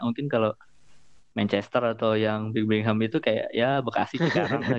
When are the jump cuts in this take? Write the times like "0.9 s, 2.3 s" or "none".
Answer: none